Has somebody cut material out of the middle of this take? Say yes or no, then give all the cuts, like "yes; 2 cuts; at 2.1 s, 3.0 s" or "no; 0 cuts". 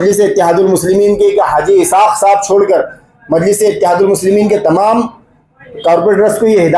no; 0 cuts